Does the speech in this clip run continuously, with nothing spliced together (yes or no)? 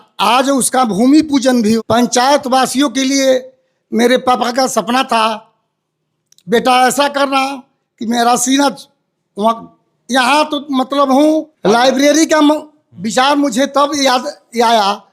no